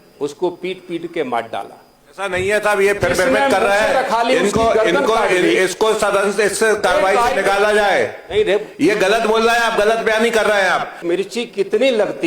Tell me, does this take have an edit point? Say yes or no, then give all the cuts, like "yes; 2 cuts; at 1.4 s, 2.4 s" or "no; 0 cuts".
yes; 1 cut; at 11.0 s